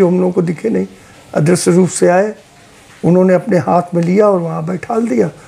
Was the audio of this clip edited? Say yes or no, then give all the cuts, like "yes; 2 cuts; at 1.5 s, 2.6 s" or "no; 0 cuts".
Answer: no; 0 cuts